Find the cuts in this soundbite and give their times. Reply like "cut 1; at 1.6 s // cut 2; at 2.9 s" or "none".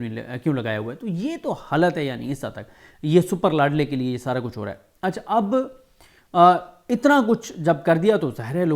none